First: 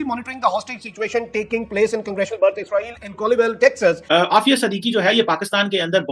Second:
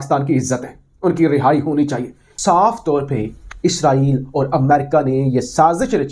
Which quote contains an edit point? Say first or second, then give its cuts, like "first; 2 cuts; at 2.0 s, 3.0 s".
first; 1 cut; at 4.0 s